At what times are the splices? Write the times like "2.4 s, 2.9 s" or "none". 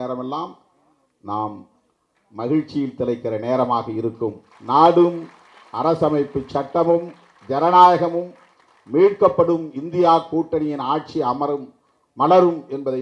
4.5 s